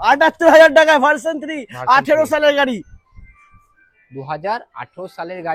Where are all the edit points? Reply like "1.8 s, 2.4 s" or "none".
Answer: none